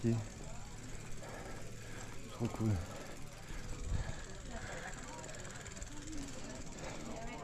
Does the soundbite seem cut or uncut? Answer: uncut